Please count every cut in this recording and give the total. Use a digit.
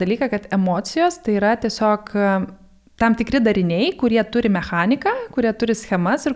0